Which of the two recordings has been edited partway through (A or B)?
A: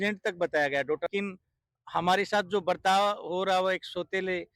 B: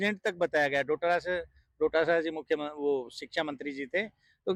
A